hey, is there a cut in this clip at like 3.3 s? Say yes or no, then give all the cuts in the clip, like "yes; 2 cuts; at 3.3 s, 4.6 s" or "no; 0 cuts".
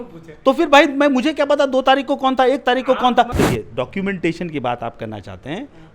yes; 1 cut; at 3.3 s